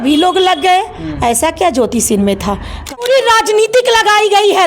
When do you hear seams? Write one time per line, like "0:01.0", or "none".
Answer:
0:03.0